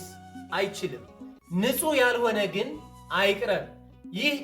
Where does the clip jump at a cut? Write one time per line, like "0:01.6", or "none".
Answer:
0:01.3